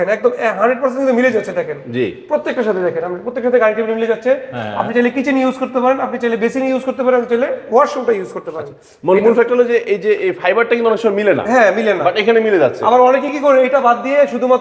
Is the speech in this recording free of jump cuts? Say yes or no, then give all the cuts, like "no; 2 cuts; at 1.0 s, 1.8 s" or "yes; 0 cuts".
yes; 0 cuts